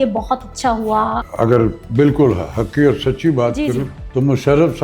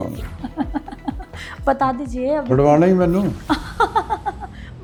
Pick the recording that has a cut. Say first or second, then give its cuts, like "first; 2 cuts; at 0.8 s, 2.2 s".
first; 2 cuts; at 1.2 s, 4.0 s